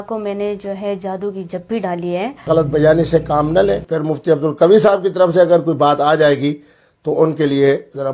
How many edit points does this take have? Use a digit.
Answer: 2